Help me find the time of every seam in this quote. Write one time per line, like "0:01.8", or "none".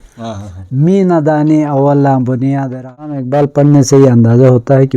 0:03.2